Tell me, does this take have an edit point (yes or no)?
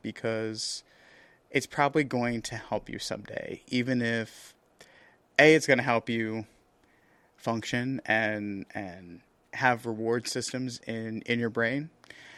no